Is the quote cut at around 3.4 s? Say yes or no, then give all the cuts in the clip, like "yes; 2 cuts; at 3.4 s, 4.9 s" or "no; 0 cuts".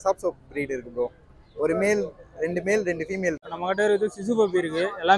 yes; 1 cut; at 3.4 s